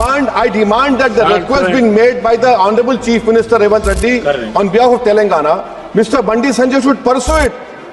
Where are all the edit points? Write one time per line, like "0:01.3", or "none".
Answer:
none